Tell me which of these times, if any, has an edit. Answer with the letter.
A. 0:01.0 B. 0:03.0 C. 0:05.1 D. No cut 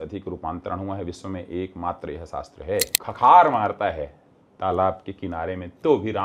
B